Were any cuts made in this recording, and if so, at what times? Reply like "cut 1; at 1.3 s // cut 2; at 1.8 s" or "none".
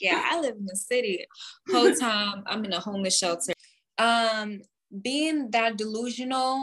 cut 1; at 3.5 s